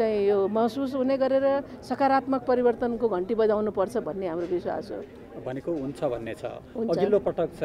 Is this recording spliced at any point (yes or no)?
no